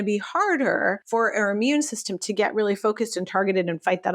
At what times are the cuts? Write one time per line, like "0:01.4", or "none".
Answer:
0:01.0